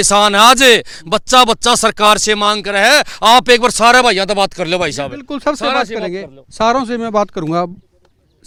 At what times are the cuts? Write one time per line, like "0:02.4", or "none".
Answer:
none